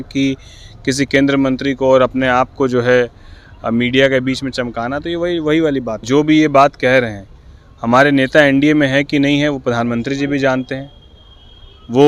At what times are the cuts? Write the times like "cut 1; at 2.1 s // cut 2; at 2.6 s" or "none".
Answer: cut 1; at 5.9 s